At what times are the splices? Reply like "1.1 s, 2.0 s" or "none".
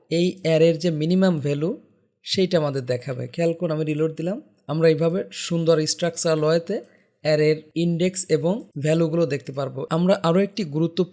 4.5 s, 7.7 s, 8.7 s, 9.8 s